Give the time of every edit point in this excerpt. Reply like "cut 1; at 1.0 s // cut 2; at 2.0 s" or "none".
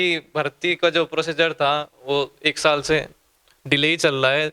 none